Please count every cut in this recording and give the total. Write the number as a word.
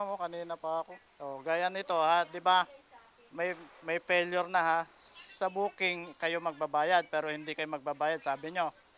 one